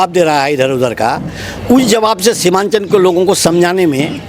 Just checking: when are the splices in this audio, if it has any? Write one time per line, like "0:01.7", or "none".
none